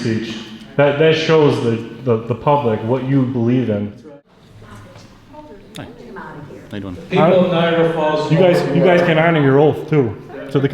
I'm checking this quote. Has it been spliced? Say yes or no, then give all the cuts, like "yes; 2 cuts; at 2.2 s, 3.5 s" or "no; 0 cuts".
yes; 1 cut; at 4.0 s